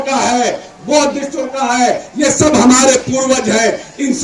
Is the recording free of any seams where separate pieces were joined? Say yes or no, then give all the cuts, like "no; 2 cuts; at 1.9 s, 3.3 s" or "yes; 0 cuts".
yes; 0 cuts